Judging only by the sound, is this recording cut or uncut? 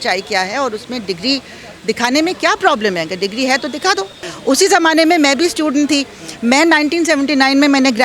cut